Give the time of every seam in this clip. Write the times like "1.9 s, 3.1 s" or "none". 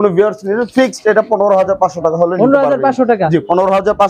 none